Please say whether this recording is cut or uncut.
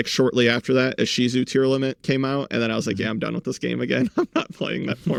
uncut